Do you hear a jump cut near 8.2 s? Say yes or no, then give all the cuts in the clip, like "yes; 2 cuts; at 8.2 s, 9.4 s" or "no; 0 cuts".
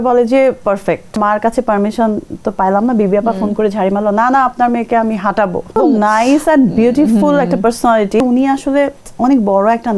yes; 3 cuts; at 1.2 s, 5.8 s, 8.2 s